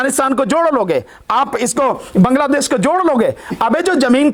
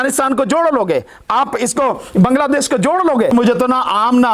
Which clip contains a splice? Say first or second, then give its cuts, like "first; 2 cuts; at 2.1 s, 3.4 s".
second; 1 cut; at 3.3 s